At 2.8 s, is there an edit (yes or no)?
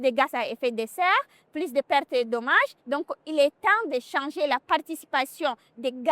yes